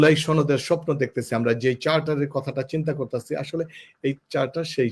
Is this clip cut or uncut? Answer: uncut